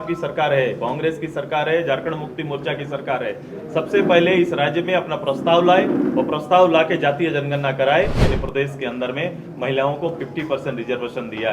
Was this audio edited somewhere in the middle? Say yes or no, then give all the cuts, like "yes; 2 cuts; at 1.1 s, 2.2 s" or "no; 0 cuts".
yes; 1 cut; at 8.2 s